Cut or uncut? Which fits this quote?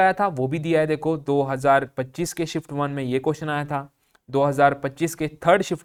uncut